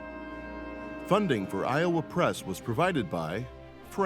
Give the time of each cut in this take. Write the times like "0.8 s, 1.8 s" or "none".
1.1 s